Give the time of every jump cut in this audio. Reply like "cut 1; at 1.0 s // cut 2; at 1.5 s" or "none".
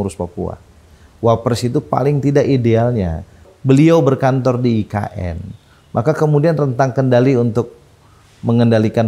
cut 1; at 3.5 s

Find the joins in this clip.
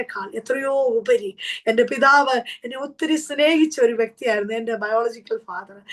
none

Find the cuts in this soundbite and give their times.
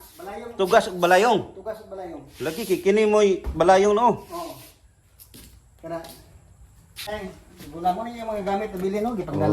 cut 1; at 7.1 s

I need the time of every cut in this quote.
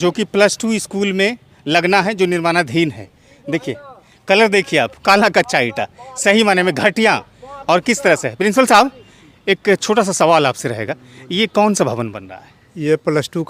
none

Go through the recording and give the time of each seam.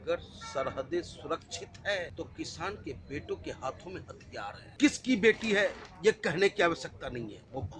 cut 1; at 2.1 s // cut 2; at 4.6 s

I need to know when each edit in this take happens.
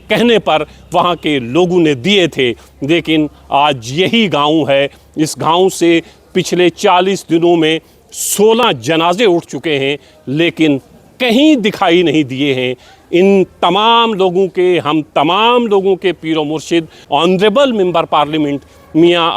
cut 1; at 17.1 s

